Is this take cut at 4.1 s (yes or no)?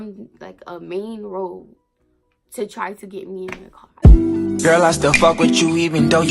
yes